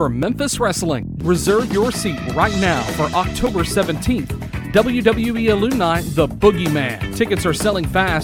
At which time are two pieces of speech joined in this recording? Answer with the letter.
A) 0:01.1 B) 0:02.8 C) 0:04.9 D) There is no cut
A